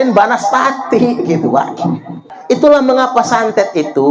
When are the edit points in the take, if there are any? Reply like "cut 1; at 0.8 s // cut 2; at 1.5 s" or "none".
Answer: cut 1; at 2.6 s